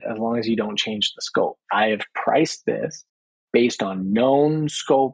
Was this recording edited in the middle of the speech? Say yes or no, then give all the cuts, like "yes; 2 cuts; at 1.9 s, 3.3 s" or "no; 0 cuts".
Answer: yes; 1 cut; at 1.6 s